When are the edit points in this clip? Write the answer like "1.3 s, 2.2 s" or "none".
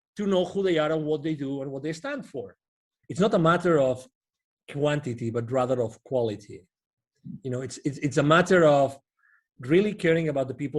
2.9 s

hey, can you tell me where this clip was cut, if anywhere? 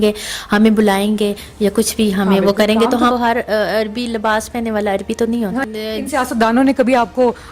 3.1 s, 5.6 s

